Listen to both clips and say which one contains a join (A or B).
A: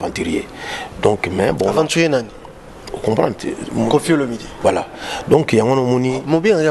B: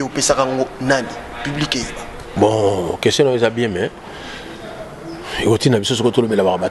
B